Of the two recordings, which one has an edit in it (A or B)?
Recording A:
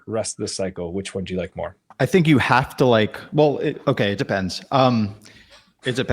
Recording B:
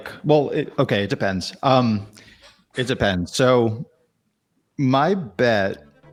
A